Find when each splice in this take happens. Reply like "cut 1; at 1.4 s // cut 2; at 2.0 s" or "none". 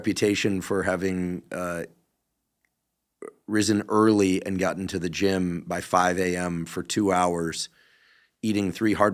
none

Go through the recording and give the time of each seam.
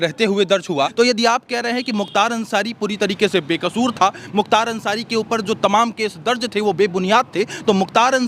cut 1; at 0.9 s

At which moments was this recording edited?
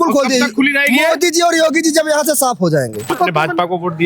cut 1; at 3.1 s

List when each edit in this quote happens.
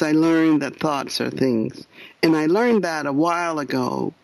none

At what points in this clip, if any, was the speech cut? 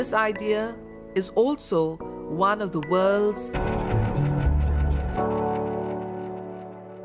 none

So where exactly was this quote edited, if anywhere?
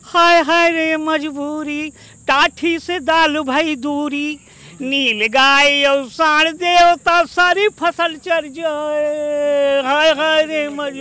none

